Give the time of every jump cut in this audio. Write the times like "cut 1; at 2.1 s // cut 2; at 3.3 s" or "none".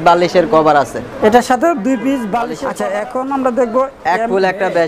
cut 1; at 2.6 s